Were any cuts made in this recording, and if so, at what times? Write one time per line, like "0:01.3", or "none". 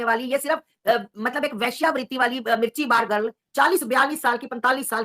0:03.4